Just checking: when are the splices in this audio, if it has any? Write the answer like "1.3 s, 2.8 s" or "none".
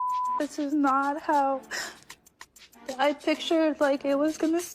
none